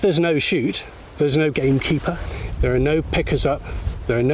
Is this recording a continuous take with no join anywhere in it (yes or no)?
yes